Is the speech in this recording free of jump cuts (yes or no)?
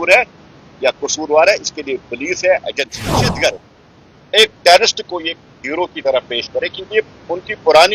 no